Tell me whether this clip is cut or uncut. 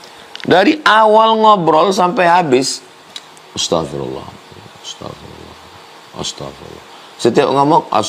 uncut